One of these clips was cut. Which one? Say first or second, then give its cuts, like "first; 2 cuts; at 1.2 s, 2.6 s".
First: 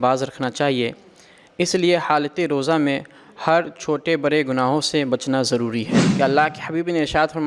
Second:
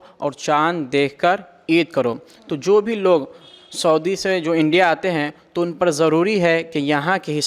first; 1 cut; at 6.0 s